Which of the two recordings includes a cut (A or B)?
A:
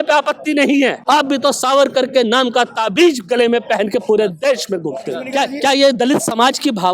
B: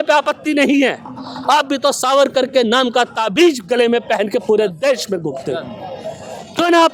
A